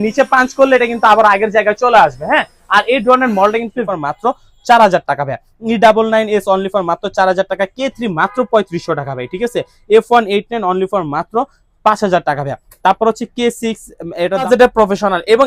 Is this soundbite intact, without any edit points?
no; 2 cuts; at 3.8 s, 14.5 s

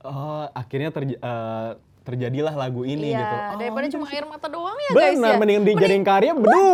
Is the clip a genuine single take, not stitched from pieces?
yes; 0 cuts

